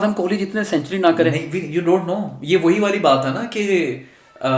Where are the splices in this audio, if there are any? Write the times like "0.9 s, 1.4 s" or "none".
none